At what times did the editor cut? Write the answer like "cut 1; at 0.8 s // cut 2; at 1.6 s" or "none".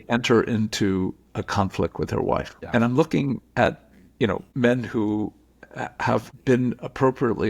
cut 1; at 2.6 s // cut 2; at 4.5 s // cut 3; at 6.3 s